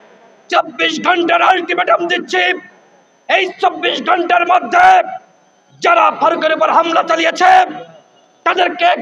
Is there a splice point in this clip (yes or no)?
no